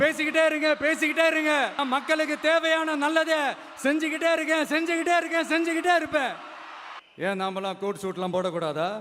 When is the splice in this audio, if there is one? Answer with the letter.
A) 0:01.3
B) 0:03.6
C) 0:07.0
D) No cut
C